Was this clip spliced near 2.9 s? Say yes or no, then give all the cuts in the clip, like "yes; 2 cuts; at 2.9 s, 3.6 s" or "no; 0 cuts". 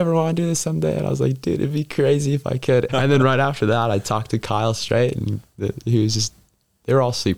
yes; 1 cut; at 2.9 s